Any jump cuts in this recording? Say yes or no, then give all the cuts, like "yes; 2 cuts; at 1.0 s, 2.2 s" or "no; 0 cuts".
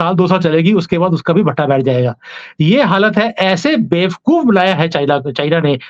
no; 0 cuts